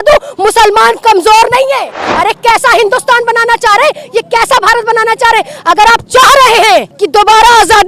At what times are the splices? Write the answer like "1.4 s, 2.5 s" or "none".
2.1 s, 7.0 s